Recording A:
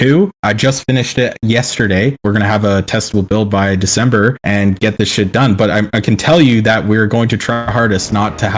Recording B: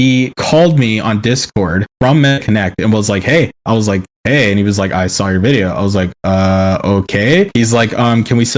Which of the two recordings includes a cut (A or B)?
A